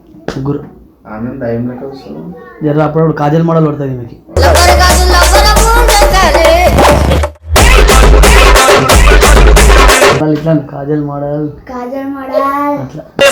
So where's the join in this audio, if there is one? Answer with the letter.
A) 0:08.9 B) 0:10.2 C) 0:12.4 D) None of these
B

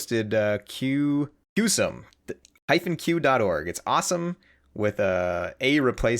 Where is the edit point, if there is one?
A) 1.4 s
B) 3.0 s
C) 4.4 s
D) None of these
A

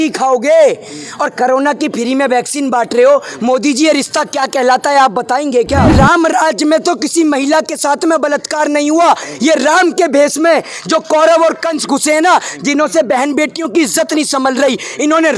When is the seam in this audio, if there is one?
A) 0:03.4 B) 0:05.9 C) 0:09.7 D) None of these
B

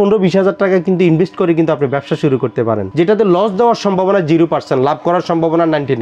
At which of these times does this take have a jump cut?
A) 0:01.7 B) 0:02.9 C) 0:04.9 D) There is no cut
B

